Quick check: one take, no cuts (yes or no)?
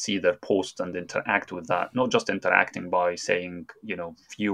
yes